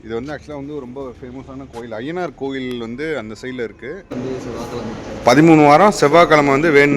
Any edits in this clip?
yes; 1 cut; at 4.1 s

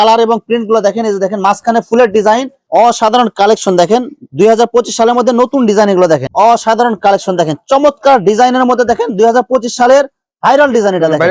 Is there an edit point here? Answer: yes; 2 cuts; at 2.6 s, 6.3 s

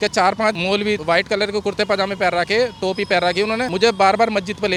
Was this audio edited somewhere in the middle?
no; 0 cuts

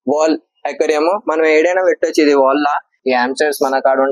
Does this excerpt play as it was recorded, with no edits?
no; 1 cut; at 2.9 s

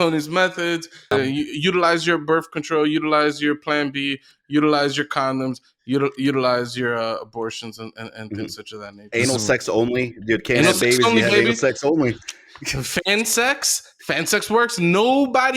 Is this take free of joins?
no; 1 cut; at 1.1 s

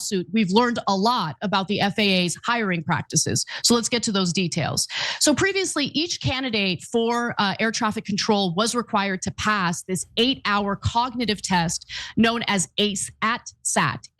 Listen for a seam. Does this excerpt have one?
no; 0 cuts

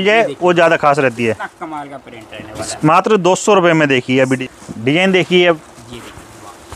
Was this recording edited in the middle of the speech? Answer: yes; 1 cut; at 4.4 s

